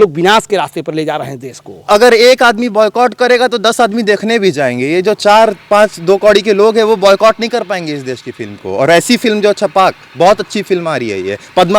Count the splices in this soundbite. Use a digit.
0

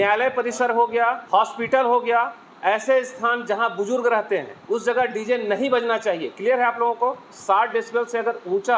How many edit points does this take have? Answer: 3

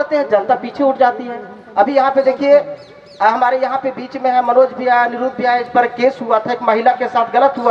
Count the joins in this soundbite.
0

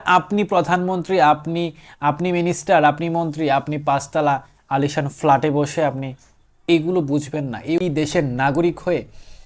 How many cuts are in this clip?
1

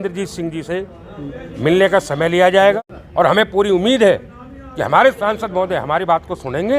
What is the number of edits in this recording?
1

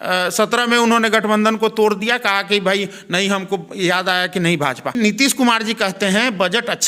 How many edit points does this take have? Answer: 1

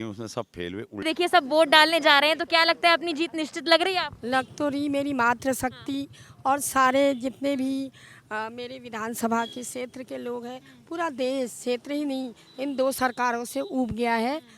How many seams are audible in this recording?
1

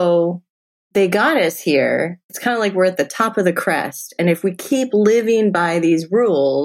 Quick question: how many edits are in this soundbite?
1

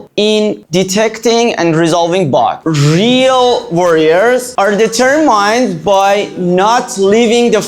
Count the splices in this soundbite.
1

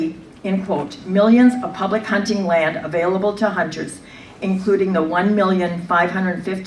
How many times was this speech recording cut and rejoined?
1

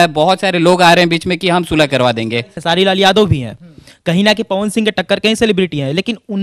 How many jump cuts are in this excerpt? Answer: 1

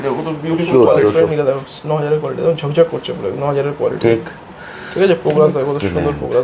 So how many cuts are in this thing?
1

